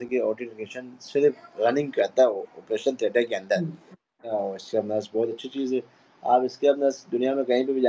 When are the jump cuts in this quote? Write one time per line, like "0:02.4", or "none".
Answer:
0:04.3